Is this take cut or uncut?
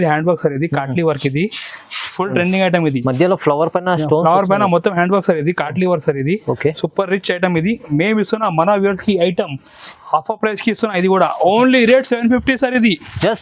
uncut